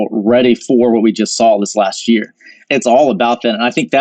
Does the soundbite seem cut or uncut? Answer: cut